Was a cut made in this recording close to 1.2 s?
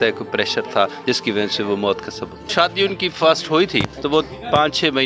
no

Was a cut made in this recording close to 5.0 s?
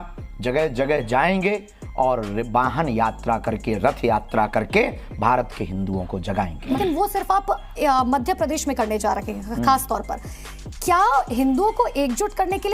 no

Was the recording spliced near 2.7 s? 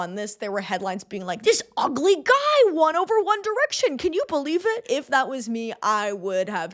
no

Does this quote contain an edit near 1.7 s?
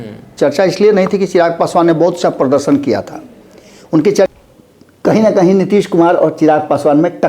no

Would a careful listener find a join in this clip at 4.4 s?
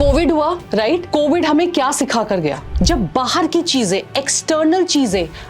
no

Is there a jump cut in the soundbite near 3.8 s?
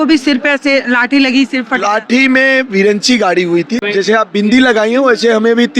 yes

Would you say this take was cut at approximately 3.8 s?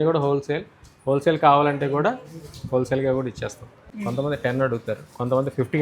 yes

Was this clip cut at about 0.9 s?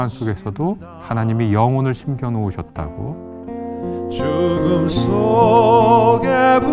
yes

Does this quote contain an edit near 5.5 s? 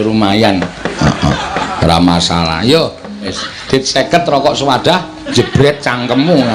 no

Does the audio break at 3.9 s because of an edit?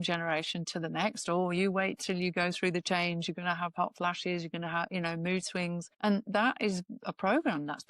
no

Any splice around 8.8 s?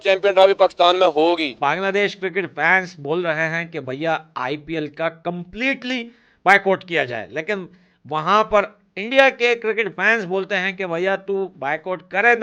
no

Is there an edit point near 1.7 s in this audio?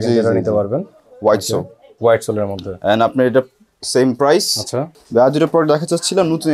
no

